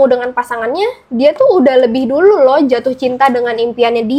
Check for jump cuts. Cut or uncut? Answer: uncut